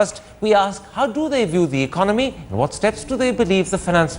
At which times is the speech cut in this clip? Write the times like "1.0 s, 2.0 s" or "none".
1.7 s